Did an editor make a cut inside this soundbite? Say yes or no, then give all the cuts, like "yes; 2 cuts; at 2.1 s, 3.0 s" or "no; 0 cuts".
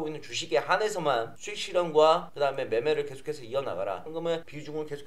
yes; 1 cut; at 4.1 s